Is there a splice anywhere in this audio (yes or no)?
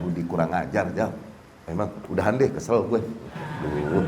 no